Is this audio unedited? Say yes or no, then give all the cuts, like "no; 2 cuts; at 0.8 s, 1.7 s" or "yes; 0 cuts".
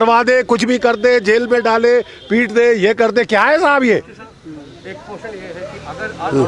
yes; 0 cuts